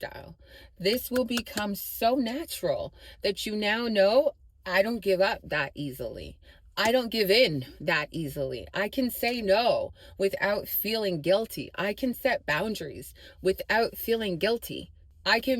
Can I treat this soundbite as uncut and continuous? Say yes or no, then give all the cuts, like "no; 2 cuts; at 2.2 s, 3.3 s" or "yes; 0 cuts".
yes; 0 cuts